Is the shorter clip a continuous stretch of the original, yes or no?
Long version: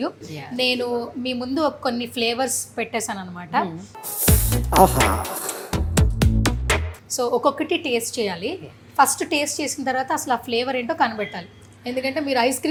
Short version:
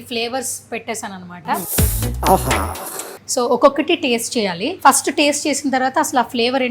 no